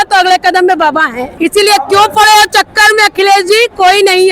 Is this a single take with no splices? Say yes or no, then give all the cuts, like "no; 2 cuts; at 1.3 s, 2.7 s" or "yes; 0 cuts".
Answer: no; 1 cut; at 1.2 s